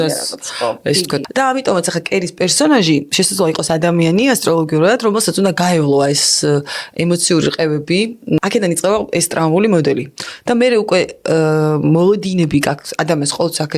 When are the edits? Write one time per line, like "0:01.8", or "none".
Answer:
0:01.3
0:08.4